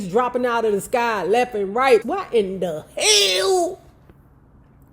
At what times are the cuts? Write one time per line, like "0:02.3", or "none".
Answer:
0:02.0